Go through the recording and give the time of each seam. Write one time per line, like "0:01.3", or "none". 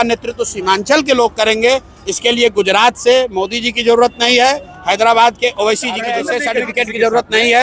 0:06.1